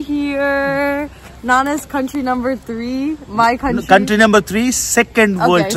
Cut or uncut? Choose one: uncut